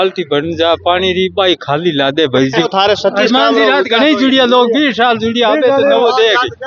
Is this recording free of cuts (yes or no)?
no